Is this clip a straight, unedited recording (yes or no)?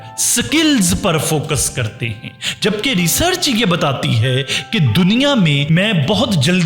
no